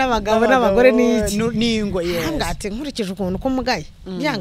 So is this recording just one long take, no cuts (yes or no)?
yes